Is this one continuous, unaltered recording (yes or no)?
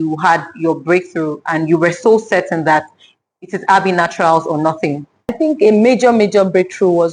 no